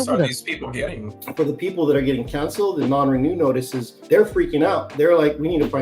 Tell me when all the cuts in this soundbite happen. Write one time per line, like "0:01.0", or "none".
0:01.2
0:04.0